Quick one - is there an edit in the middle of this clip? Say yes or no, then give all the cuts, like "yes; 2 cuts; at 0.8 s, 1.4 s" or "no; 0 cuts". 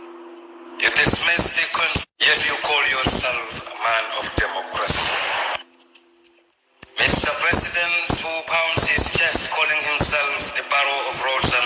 yes; 1 cut; at 2.0 s